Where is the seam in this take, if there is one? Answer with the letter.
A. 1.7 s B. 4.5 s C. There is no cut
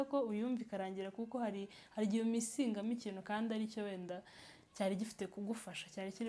C